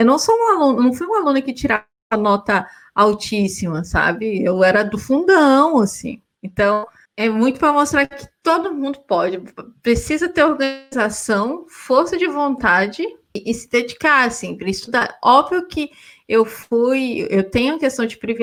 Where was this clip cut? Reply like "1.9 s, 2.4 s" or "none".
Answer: none